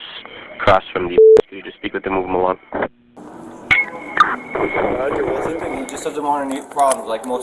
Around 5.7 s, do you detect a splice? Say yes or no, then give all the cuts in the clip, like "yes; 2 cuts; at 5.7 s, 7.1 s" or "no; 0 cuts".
yes; 1 cut; at 5.7 s